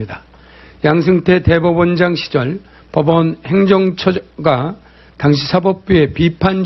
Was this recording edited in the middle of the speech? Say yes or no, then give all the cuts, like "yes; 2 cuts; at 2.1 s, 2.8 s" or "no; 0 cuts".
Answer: no; 0 cuts